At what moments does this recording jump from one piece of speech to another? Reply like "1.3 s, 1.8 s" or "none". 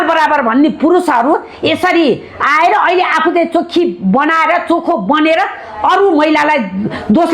none